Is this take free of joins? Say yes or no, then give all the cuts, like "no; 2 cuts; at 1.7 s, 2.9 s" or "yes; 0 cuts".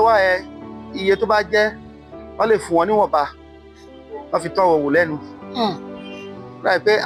yes; 0 cuts